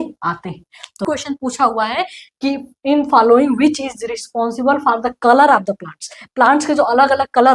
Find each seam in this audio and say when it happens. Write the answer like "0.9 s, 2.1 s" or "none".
1.1 s

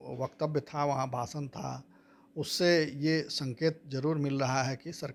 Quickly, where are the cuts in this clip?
none

